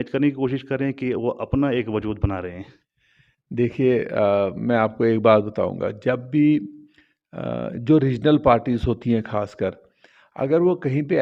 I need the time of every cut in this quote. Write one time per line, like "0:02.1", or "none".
none